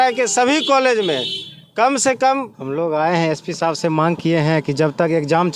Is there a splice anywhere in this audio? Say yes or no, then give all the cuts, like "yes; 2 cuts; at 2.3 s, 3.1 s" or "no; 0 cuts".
yes; 1 cut; at 2.5 s